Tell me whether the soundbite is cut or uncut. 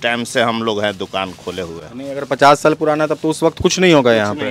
uncut